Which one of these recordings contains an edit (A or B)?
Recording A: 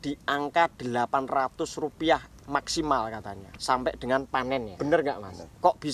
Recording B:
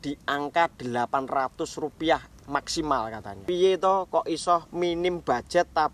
B